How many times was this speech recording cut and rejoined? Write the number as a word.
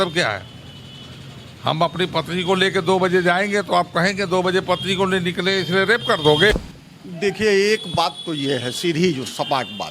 one